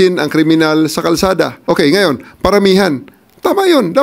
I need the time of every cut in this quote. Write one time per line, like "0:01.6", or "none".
0:01.6